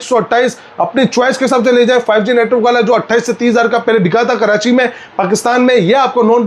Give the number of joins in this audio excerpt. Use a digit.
0